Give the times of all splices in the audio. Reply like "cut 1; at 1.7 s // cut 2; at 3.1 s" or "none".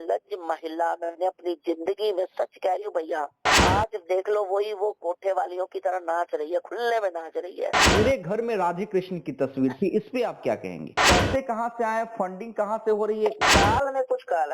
cut 1; at 3.5 s // cut 2; at 7.8 s // cut 3; at 11.0 s // cut 4; at 13.4 s